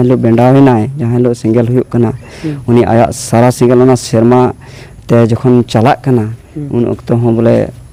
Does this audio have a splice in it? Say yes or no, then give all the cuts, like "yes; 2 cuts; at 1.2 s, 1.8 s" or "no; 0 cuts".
no; 0 cuts